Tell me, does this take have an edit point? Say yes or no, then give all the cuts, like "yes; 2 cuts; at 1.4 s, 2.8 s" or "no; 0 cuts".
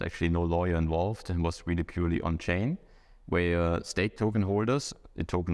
no; 0 cuts